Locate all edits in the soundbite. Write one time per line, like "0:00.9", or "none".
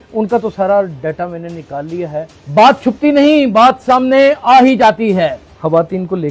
0:02.4
0:05.4